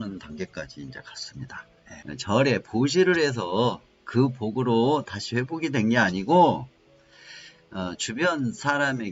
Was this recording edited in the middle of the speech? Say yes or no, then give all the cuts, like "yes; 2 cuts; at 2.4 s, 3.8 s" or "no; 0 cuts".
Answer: yes; 1 cut; at 1.9 s